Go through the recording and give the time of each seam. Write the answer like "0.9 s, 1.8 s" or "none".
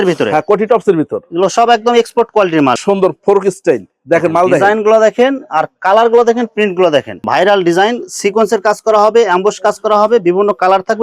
2.8 s, 7.2 s